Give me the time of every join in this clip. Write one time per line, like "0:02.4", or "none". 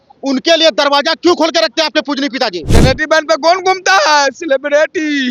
0:02.7